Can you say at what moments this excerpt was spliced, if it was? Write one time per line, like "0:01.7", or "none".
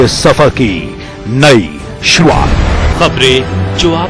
0:02.2